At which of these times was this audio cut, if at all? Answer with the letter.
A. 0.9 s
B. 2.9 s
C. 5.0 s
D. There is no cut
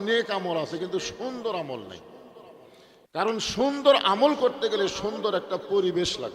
D